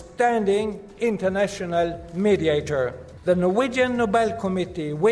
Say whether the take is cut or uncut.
cut